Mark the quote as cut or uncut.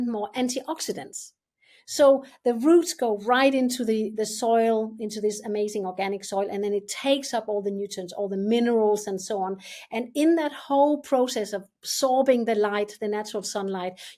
uncut